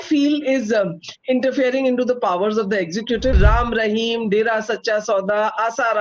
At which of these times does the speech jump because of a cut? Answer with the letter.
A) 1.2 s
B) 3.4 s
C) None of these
B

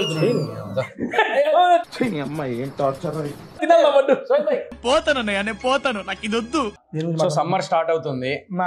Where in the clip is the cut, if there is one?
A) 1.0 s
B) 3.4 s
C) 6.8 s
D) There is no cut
C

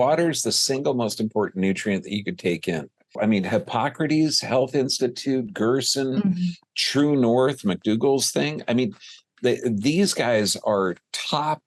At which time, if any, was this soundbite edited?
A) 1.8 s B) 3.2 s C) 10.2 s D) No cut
B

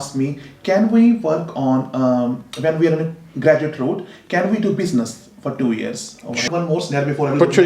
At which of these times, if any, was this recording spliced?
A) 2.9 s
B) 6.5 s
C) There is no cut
B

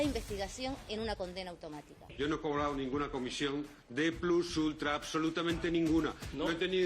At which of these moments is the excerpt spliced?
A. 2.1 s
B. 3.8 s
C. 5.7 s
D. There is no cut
A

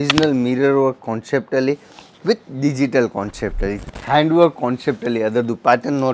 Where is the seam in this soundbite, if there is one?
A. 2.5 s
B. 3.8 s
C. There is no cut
B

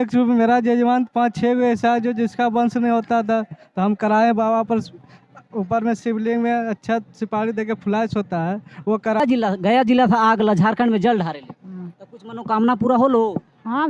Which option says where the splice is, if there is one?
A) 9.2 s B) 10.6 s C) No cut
A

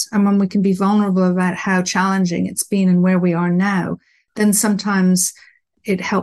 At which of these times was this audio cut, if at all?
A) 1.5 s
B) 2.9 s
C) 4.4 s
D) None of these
D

